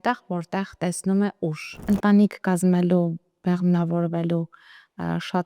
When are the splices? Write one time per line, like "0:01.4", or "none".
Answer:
0:01.7